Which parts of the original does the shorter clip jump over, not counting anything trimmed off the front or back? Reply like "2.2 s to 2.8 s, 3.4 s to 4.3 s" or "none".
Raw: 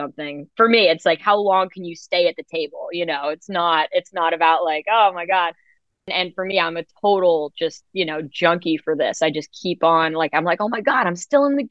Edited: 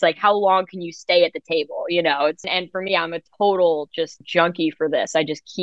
3.4 s to 6.0 s, 7.8 s to 8.3 s